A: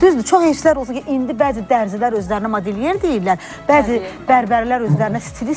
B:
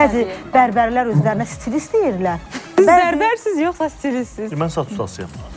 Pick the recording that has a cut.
B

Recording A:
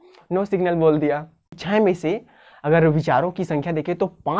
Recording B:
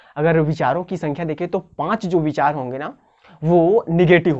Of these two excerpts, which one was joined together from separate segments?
A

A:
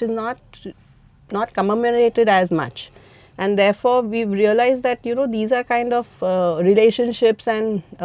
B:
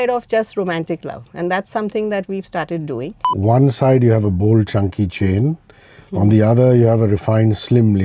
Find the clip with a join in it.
B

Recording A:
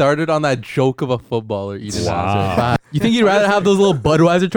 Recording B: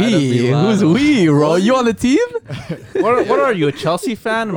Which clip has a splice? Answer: A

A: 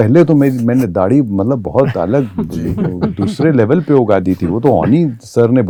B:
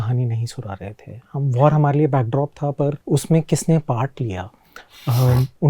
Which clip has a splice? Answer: B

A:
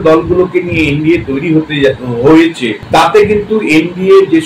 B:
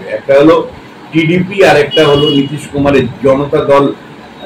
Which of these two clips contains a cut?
A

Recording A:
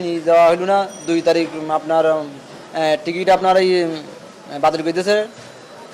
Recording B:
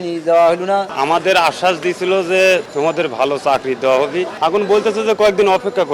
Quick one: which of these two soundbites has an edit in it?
B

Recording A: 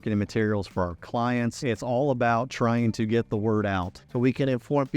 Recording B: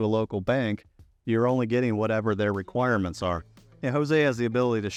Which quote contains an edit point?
A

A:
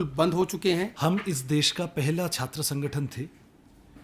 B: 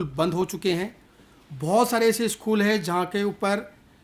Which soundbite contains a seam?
A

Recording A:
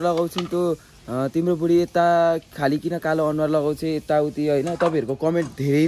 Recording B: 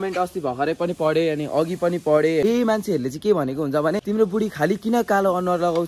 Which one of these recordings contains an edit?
B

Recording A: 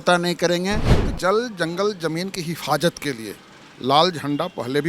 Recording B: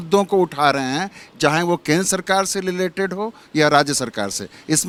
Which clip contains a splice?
A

